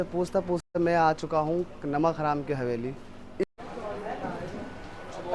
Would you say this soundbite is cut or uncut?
cut